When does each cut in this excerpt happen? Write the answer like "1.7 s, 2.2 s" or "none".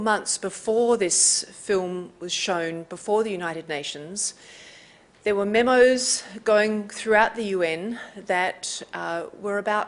6.0 s